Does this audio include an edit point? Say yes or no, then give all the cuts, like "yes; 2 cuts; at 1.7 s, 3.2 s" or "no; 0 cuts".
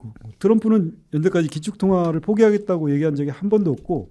no; 0 cuts